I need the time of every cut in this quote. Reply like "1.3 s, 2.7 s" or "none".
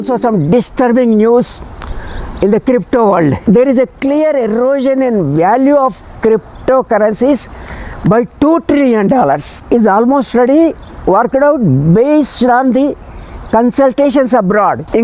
3.4 s, 9.6 s